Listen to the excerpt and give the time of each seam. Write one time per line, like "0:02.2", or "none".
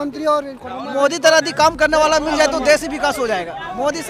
none